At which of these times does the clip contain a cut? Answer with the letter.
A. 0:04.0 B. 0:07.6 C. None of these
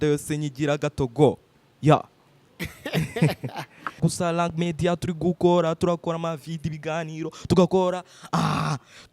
A